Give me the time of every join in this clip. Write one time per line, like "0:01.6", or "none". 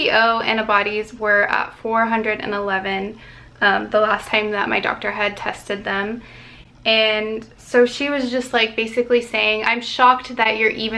0:09.6